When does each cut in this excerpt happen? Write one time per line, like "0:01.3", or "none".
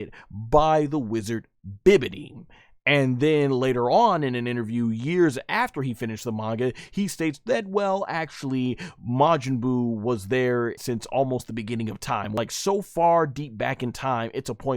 0:10.8
0:12.3